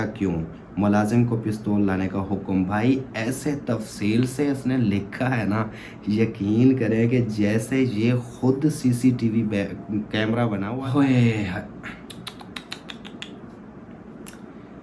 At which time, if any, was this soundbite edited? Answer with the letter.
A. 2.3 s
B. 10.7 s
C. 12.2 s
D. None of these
B